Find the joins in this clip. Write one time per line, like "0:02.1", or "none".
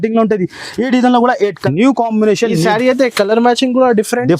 0:01.6